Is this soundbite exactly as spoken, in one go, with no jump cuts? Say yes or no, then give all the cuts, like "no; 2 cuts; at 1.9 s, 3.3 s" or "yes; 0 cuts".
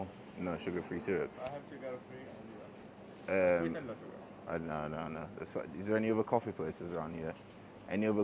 yes; 0 cuts